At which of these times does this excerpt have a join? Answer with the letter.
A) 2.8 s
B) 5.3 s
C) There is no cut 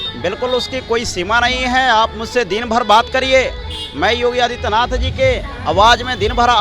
C